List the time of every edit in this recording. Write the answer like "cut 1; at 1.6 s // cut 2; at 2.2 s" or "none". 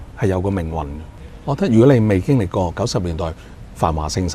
cut 1; at 1.3 s